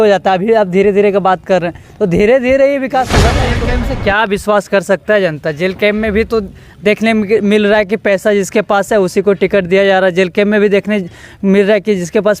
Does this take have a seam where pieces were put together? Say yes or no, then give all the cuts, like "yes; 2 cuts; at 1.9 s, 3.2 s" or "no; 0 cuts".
yes; 1 cut; at 3.5 s